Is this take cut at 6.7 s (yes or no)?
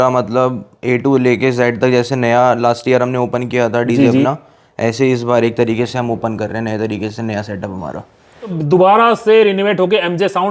no